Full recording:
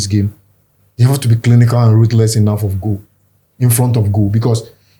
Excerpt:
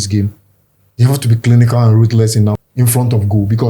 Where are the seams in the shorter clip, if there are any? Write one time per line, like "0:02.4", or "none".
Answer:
0:02.7

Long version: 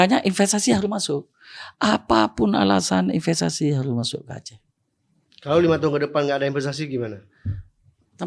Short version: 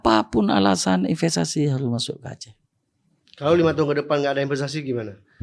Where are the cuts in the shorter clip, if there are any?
none

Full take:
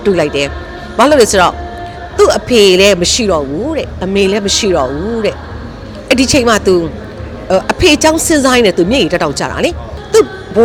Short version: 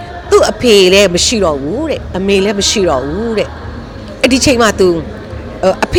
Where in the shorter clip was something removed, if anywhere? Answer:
none

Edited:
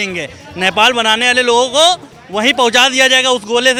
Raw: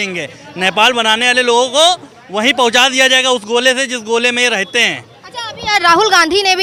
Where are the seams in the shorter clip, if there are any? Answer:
none

